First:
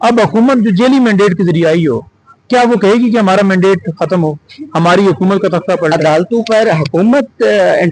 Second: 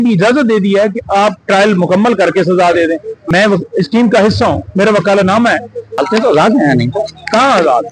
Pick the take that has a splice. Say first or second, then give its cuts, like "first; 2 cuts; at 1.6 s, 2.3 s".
second; 2 cuts; at 3.2 s, 5.9 s